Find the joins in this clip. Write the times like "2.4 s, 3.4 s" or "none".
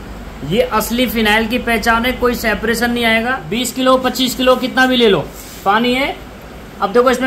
3.4 s